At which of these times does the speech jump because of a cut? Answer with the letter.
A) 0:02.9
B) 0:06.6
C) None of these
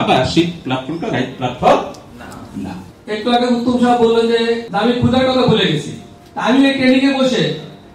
A